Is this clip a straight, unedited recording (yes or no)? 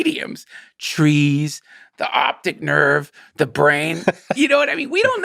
yes